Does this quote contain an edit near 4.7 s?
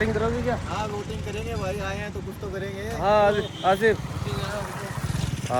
no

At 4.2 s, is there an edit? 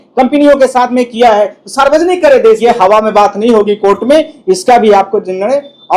no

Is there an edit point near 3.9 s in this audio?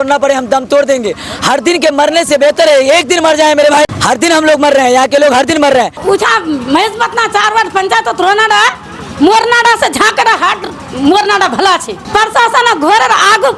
yes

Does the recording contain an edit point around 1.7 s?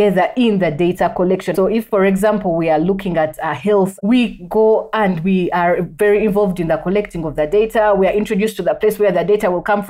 yes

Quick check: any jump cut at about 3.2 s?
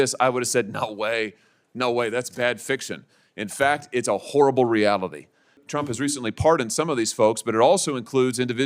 no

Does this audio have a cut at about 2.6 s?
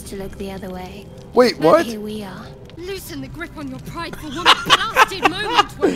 yes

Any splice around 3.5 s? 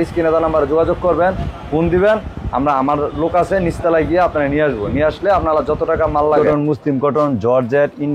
no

